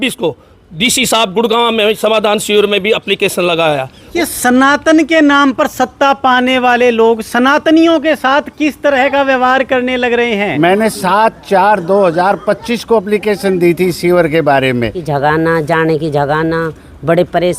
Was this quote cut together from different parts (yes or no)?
yes